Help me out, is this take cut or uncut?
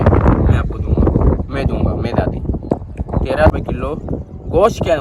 cut